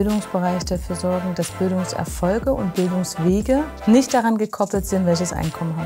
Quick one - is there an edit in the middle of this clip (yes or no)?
no